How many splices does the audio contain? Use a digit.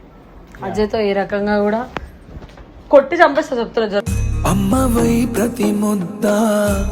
0